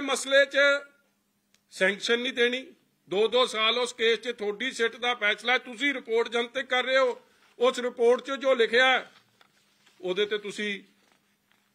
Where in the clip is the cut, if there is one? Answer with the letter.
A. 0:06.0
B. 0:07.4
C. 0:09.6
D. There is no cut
D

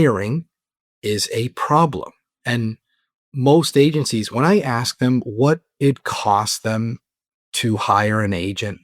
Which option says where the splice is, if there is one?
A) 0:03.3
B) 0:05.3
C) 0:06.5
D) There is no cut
A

